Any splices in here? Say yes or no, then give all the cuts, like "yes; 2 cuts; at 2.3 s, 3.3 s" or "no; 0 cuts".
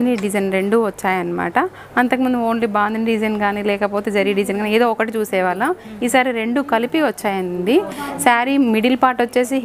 no; 0 cuts